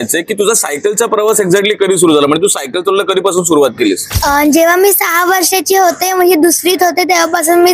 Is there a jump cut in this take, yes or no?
no